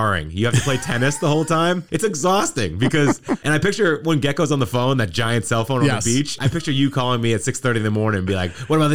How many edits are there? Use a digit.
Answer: 2